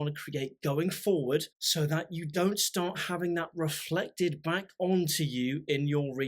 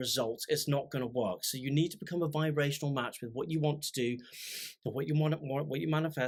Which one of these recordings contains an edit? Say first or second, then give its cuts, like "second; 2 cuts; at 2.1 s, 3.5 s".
first; 1 cut; at 1.6 s